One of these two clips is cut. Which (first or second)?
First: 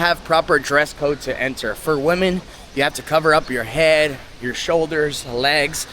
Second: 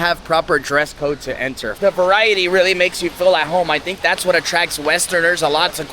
second